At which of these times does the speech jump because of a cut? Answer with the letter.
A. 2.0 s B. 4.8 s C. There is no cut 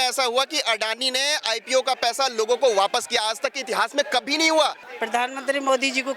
B